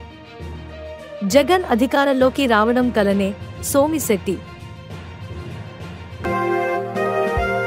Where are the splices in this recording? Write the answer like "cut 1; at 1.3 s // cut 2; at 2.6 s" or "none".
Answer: none